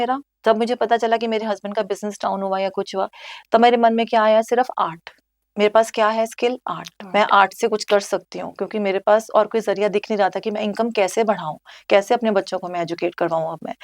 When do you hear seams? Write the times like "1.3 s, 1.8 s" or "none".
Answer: none